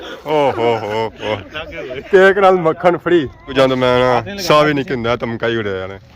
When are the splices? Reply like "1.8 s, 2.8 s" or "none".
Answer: 3.4 s